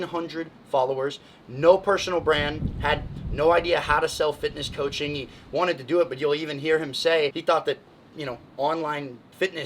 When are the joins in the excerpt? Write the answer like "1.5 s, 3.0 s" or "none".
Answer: 7.4 s